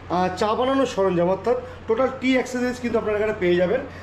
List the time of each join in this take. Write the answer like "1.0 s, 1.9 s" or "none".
none